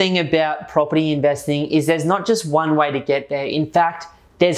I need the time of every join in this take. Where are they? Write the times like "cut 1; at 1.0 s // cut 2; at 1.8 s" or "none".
none